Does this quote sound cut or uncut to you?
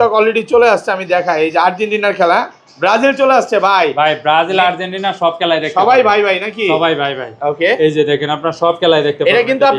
uncut